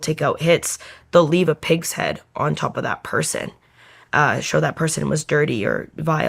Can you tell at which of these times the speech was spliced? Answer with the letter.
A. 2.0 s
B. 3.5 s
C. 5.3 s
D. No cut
D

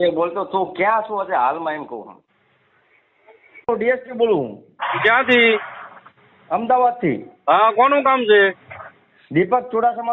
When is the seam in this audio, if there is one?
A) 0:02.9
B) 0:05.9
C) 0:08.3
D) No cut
D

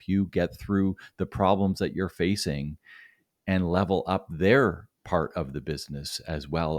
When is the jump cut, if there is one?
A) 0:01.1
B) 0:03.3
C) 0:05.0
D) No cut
D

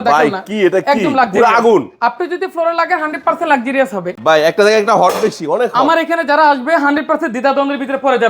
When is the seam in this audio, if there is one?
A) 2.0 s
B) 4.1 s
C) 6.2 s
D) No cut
B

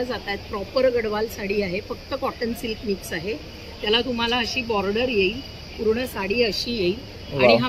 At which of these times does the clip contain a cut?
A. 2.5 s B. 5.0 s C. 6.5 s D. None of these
D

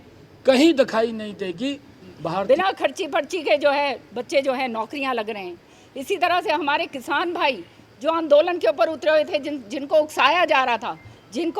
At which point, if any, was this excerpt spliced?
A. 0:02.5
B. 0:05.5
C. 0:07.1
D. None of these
A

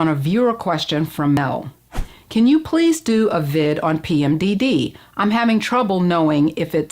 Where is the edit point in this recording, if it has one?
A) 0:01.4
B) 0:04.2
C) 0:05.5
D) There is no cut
A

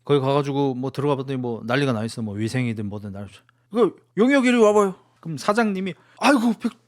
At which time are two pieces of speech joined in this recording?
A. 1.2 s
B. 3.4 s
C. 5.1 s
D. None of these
C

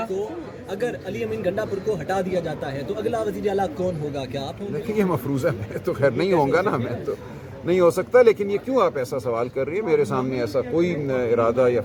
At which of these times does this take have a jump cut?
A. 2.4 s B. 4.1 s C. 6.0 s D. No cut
D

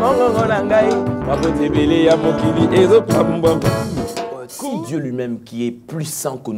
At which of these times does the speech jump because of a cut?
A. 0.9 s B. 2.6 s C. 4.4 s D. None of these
C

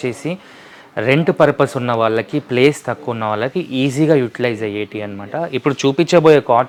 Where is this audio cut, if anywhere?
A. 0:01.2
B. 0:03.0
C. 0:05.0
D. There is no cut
D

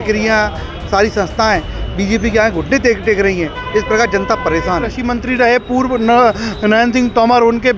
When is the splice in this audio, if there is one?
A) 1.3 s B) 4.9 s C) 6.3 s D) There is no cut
B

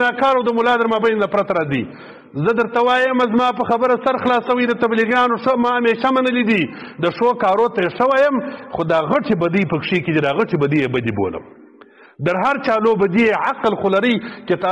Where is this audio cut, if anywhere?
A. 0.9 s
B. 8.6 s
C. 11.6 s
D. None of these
D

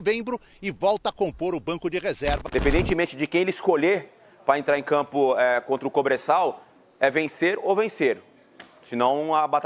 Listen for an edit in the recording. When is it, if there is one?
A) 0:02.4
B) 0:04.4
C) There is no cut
A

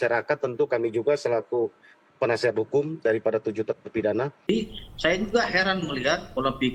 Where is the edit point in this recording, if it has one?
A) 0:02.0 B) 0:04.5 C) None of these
B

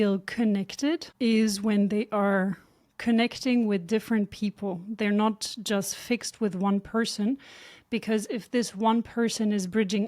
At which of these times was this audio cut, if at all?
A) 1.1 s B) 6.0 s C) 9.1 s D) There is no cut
A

